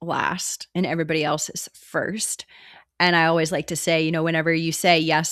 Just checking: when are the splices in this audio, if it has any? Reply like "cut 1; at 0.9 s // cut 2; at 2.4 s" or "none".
none